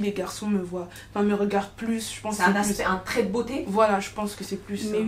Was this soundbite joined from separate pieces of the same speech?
no; 0 cuts

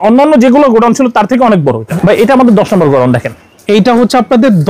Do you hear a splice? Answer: yes; 1 cut; at 1.8 s

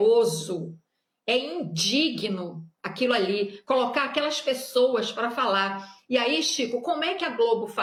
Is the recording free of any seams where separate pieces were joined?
yes; 0 cuts

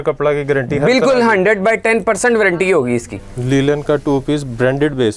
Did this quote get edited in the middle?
yes; 1 cut; at 3.2 s

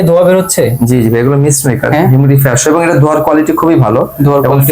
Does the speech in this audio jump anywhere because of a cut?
no; 0 cuts

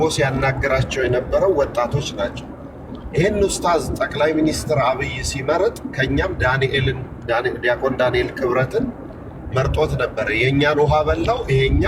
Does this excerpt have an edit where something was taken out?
no; 0 cuts

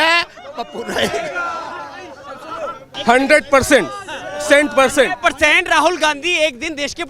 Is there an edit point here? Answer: yes; 1 cut; at 2.9 s

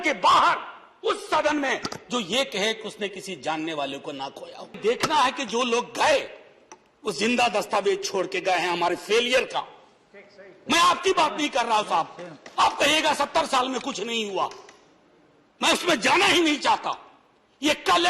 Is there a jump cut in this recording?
yes; 1 cut; at 4.8 s

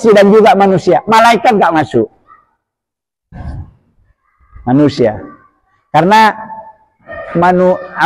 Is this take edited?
no; 0 cuts

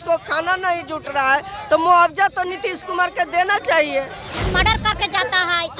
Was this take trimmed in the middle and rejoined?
yes; 1 cut; at 4.3 s

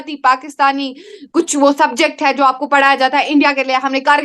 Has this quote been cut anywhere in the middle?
no; 0 cuts

